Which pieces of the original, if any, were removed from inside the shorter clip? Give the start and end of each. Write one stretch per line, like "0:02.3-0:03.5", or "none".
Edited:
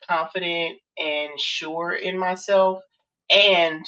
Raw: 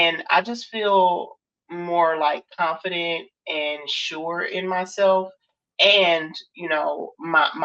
none

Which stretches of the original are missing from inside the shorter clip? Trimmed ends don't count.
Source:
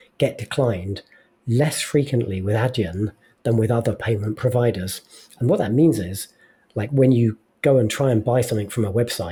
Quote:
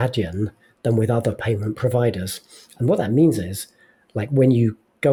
none

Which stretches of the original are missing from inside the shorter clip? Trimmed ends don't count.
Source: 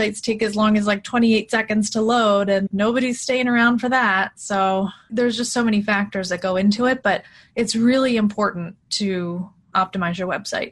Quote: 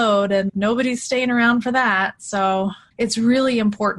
0:05.0-0:07.4

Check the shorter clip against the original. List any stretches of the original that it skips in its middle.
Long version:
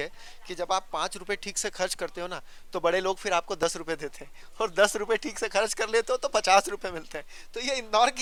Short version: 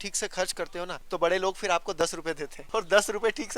0:02.4-0:02.6
0:04.2-0:04.4

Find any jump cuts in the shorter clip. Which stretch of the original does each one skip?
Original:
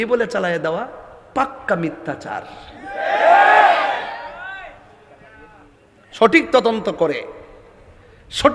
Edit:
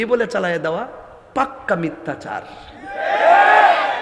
none

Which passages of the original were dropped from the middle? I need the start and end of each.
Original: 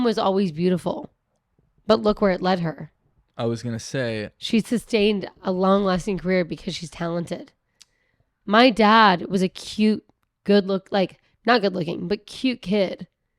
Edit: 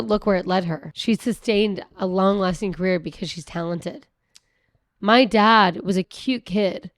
0:02.9-0:04.4
0:09.6-0:12.3

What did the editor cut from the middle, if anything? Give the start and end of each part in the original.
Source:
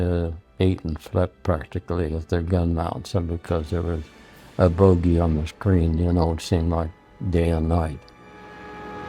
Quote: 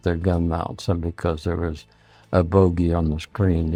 none

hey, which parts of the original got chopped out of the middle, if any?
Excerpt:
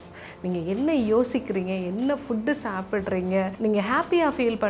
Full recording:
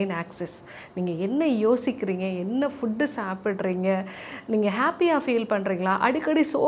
0:04.1-0:04.4

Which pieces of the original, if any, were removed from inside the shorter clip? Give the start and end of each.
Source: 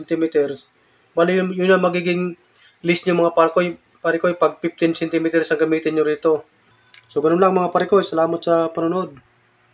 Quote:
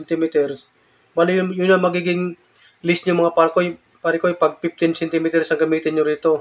none

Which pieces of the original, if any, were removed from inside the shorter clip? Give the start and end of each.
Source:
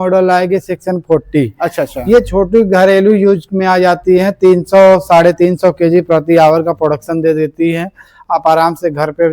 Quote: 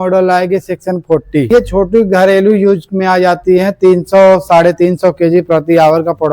0:01.5-0:02.1

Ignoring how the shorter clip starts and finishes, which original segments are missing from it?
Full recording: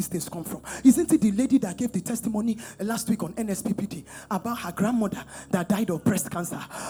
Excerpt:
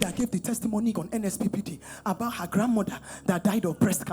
0:02.6-0:03.2

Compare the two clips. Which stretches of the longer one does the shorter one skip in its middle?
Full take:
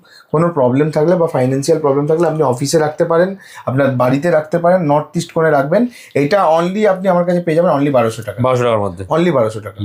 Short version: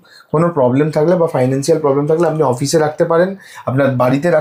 none

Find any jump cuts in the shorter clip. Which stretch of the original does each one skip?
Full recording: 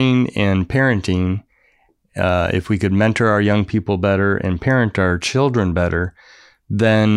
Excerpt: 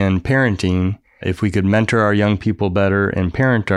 0:01.7-0:02.5

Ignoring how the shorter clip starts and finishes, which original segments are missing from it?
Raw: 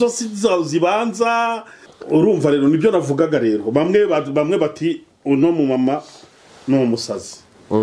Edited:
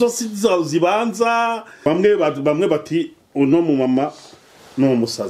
0:01.8-0:03.7

